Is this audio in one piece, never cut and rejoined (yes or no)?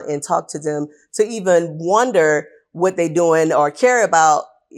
yes